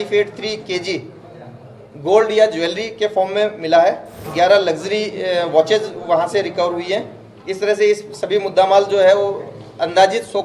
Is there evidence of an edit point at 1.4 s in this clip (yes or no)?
no